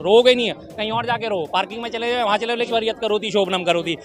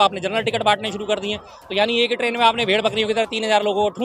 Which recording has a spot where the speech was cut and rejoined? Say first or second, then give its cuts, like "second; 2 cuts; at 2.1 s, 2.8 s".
first; 1 cut; at 2.7 s